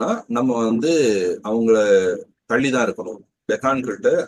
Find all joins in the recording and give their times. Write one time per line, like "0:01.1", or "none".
none